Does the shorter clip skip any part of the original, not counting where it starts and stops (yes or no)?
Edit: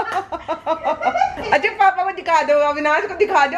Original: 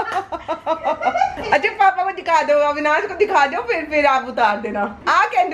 no